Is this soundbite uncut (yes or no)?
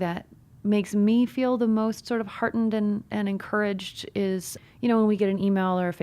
no